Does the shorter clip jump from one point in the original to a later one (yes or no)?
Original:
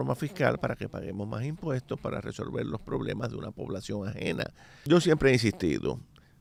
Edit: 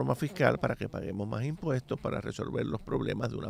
no